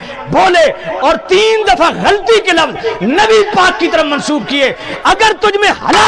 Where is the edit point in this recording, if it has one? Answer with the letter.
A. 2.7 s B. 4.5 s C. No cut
C